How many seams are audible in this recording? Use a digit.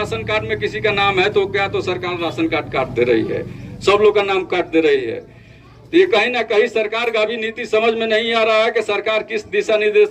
0